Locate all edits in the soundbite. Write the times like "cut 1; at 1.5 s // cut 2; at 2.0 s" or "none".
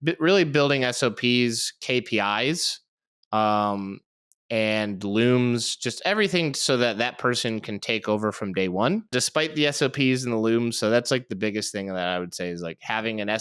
cut 1; at 9.1 s